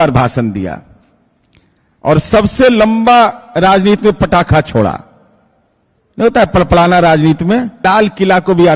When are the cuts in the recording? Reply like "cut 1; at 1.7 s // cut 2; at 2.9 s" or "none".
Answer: cut 1; at 7.8 s